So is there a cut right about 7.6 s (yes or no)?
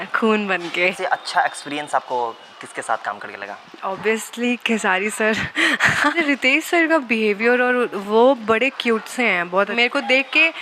no